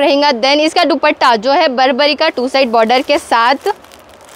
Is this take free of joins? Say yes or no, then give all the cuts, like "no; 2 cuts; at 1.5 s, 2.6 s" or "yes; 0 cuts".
yes; 0 cuts